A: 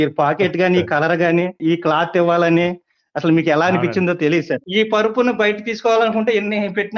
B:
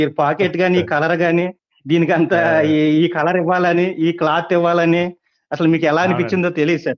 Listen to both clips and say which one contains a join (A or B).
A